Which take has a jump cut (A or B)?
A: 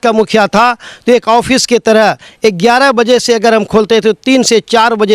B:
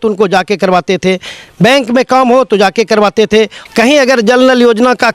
B